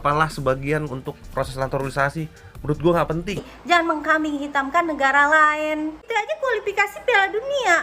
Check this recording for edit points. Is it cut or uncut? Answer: cut